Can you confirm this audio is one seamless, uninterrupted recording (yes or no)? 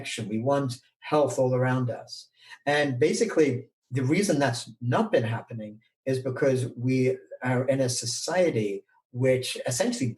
no